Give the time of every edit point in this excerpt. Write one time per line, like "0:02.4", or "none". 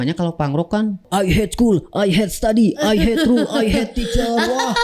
0:01.0